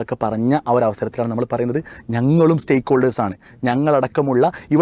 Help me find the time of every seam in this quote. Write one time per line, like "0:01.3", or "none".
none